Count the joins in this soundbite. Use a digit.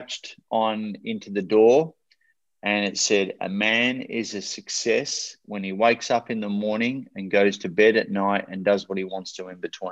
0